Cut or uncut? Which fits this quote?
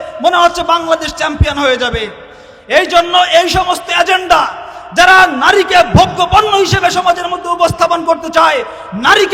uncut